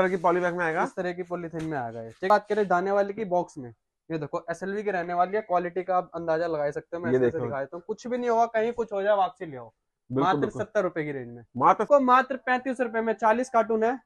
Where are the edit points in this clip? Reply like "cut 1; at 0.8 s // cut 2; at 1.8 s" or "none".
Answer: cut 1; at 2.3 s // cut 2; at 11.8 s